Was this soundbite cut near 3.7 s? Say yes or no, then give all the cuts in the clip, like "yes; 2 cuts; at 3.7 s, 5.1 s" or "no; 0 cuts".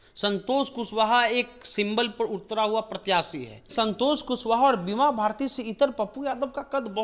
yes; 1 cut; at 3.7 s